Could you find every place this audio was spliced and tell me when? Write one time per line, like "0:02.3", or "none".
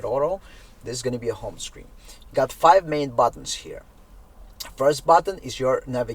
none